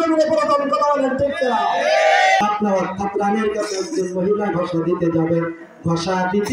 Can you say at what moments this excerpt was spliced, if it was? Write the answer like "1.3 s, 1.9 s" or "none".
2.4 s